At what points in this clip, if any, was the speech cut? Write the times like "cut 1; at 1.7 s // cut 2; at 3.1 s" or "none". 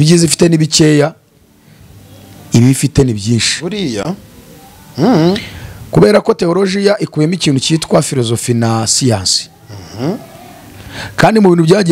none